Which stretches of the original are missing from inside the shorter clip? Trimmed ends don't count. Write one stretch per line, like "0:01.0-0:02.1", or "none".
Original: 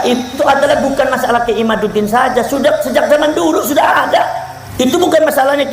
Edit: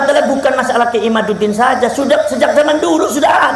none